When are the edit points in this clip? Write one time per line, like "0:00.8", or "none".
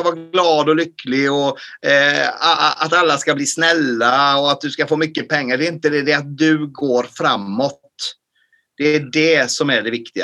none